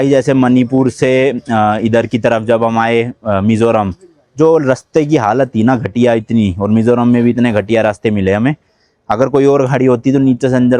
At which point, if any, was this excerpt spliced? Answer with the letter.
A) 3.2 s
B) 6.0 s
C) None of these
C